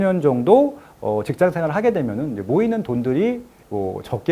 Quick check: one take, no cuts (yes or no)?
yes